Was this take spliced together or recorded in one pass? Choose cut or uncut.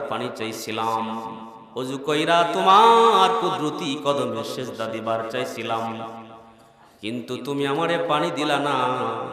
uncut